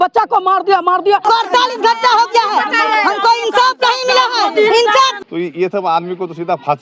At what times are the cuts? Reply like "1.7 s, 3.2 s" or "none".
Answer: 1.2 s, 5.2 s

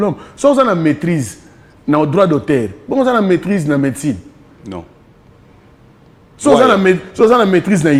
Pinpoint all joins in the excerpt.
none

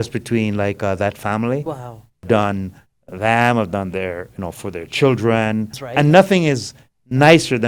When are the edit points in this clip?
2.2 s, 5.7 s

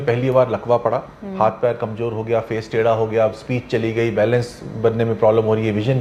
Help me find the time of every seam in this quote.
none

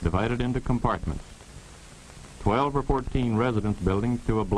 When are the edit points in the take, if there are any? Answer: none

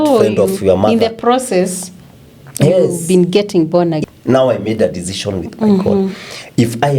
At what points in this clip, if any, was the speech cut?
4.0 s

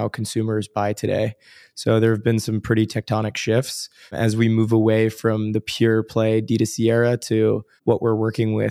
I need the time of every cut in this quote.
4.2 s, 7.7 s

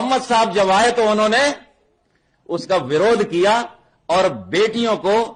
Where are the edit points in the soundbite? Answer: none

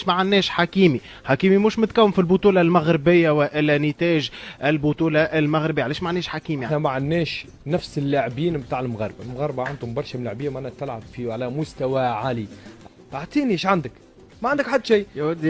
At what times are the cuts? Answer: 6.7 s, 12.8 s

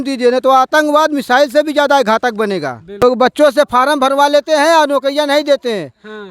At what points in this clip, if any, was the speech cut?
3.0 s

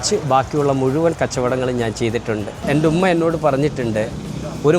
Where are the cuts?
2.6 s

